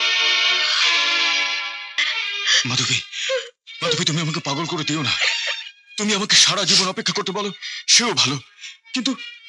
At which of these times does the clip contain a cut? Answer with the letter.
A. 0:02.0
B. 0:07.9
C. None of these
A